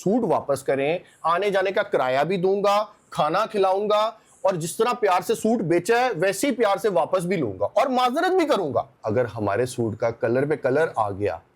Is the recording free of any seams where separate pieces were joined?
no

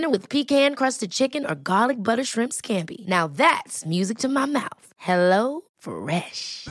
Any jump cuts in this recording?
no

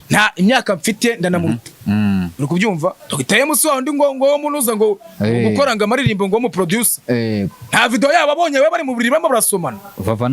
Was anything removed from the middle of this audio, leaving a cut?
yes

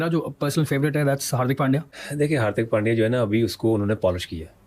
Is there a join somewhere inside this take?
yes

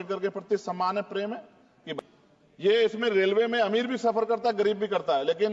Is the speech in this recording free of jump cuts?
no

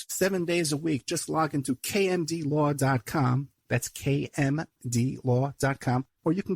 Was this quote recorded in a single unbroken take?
yes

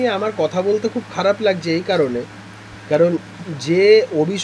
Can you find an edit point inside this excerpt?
no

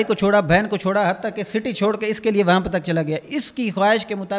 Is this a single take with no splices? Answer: yes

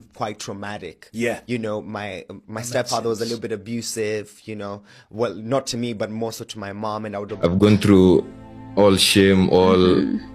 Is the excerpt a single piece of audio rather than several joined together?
no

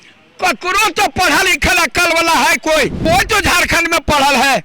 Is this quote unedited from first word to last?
no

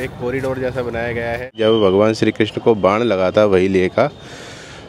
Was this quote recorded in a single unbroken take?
no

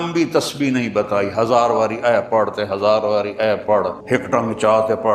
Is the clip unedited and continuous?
yes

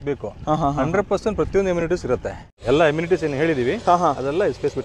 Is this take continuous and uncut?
no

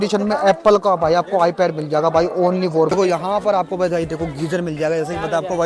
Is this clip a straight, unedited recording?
no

